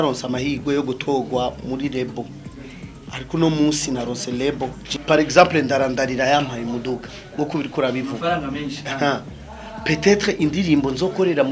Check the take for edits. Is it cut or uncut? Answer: cut